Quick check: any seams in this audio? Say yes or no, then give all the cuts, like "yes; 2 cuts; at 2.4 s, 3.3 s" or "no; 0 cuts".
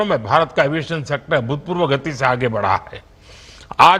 no; 0 cuts